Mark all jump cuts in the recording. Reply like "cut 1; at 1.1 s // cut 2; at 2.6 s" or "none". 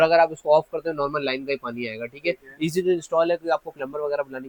none